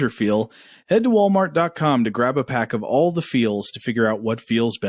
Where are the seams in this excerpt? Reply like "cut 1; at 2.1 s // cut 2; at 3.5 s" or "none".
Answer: none